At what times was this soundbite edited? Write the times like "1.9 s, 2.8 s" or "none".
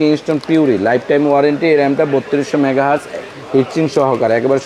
none